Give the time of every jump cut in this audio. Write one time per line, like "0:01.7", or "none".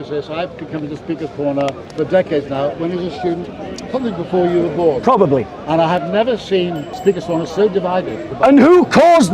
0:01.8
0:06.9
0:08.3